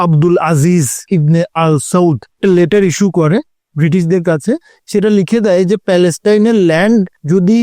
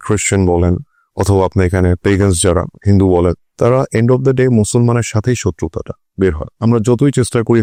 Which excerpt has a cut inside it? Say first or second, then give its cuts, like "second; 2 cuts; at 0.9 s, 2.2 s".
first; 3 cuts; at 1.0 s, 2.3 s, 4.7 s